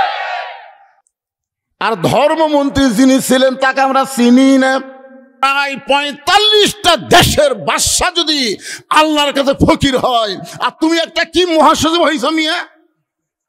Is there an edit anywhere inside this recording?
yes; 1 cut; at 5.4 s

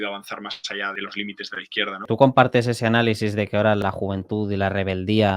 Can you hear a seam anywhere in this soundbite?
yes; 3 cuts; at 0.9 s, 2.0 s, 3.8 s

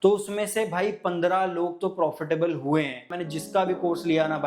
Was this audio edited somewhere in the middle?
yes; 1 cut; at 3.1 s

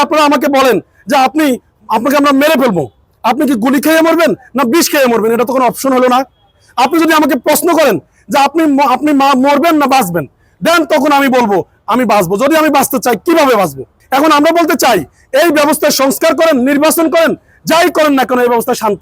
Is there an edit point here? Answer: no; 0 cuts

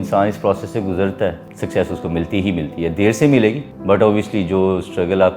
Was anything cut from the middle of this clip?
yes; 2 cuts; at 1.5 s, 3.7 s

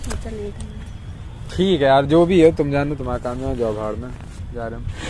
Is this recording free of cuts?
yes; 0 cuts

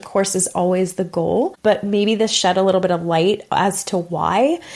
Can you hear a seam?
yes; 1 cut; at 1.6 s

